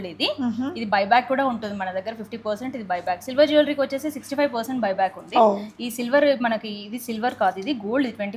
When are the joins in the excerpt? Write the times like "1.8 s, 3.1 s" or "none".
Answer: none